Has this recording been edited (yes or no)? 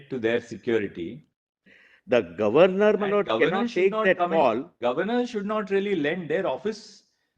yes